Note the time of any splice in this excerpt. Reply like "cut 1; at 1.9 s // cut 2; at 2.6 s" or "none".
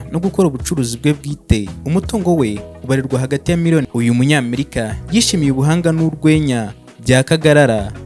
cut 1; at 3.9 s